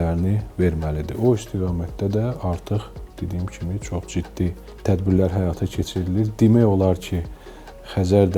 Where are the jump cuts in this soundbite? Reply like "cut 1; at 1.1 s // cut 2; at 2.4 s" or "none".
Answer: none